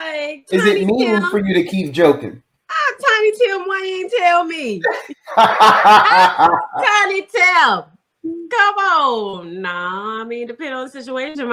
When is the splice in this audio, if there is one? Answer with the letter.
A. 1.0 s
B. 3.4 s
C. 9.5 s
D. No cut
D